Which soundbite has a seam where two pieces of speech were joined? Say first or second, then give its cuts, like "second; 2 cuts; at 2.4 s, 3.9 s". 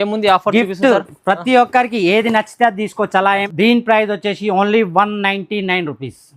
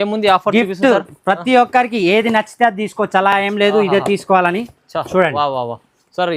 first; 1 cut; at 3.4 s